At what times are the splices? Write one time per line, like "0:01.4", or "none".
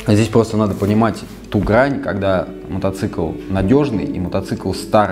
none